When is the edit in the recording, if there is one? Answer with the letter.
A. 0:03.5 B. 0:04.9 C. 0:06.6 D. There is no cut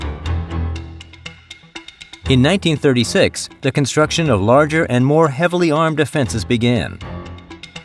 C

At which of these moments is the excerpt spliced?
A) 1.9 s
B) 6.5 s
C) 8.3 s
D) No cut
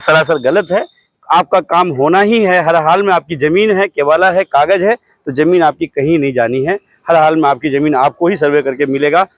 D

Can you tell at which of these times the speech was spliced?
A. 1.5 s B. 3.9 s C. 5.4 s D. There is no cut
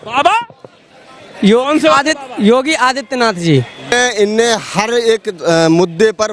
B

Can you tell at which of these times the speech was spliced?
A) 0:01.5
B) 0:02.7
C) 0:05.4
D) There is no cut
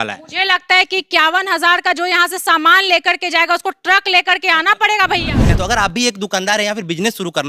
C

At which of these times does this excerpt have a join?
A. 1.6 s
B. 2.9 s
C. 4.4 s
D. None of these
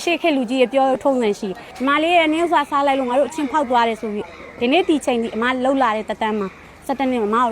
A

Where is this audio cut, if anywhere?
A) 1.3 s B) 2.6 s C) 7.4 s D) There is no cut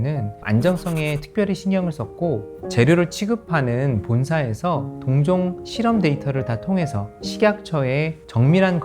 B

